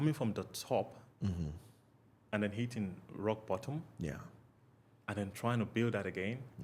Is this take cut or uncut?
uncut